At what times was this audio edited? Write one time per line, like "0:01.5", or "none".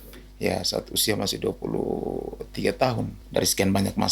0:03.2